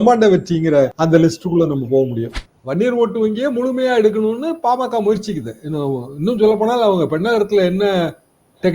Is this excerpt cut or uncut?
cut